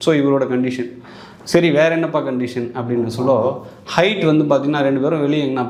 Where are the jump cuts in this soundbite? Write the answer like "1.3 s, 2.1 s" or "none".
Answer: none